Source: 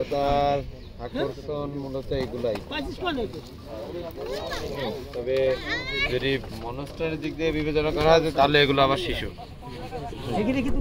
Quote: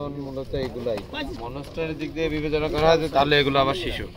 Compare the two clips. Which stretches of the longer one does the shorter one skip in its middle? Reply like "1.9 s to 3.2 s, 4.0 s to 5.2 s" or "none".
2.9 s to 6.6 s